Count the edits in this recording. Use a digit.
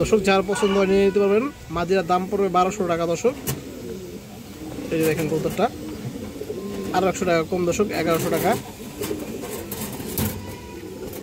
0